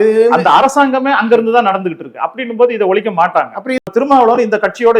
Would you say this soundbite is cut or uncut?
cut